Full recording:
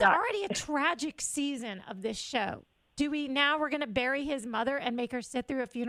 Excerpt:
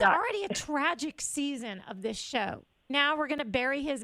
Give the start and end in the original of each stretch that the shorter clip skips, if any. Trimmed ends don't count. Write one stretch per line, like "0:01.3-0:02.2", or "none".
0:02.9-0:03.3